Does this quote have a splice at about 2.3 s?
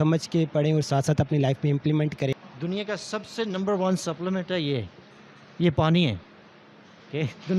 yes; 1 cut; at 2.3 s

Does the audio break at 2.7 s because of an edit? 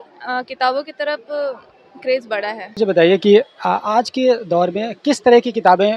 yes; 1 cut; at 2.7 s

